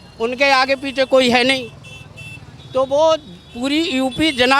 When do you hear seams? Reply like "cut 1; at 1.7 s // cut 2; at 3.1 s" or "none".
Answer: none